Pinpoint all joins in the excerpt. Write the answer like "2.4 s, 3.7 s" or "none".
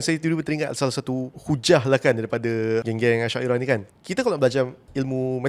1.3 s, 2.8 s, 3.9 s